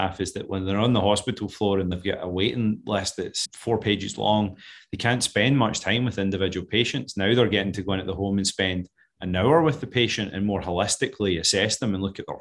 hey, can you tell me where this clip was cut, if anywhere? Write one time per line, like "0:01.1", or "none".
0:02.0